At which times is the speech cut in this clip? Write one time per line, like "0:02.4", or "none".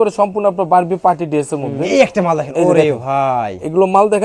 0:01.8